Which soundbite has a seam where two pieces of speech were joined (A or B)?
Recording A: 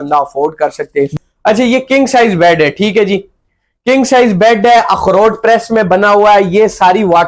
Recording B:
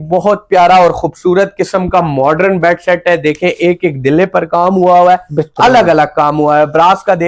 A